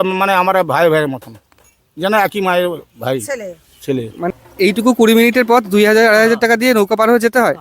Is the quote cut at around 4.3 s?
yes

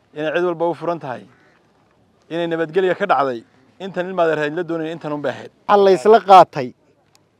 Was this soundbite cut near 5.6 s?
yes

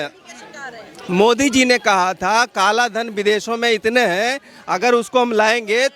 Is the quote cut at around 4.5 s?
no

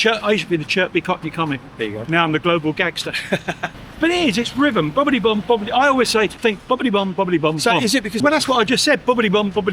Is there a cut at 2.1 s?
no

